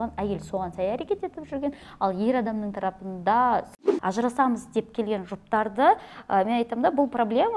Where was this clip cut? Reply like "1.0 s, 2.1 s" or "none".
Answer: 3.9 s